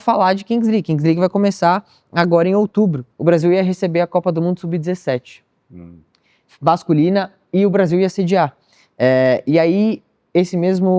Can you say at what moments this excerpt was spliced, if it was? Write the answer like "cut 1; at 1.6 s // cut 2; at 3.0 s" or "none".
cut 1; at 3.1 s